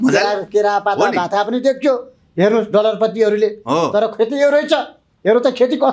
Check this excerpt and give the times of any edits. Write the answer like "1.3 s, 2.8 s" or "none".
none

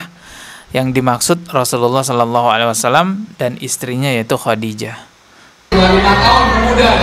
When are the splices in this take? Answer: none

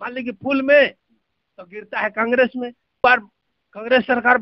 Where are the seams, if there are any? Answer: 2.8 s

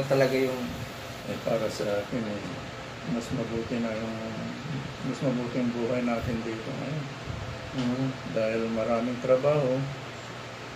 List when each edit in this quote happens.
1.2 s

